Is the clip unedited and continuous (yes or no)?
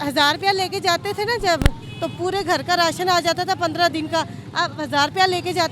yes